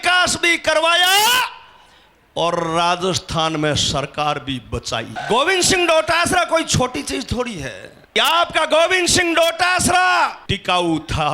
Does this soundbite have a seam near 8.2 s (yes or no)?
yes